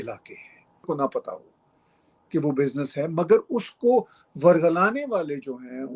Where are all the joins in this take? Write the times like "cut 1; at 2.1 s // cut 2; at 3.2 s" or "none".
cut 1; at 0.9 s